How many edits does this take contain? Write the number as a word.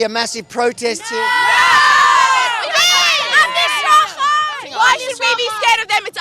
one